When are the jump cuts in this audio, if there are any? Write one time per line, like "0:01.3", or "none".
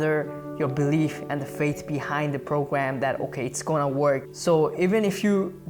0:04.3